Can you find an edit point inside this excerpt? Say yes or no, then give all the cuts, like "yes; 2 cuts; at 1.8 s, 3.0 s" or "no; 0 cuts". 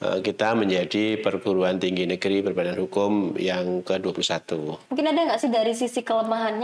yes; 1 cut; at 4.8 s